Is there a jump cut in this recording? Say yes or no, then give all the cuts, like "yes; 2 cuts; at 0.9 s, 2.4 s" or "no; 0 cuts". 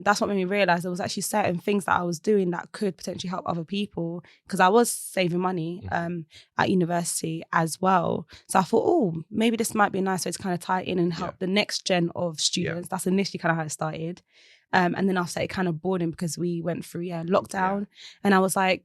no; 0 cuts